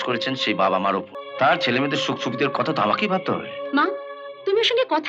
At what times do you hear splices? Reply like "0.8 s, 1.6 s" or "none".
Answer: 1.2 s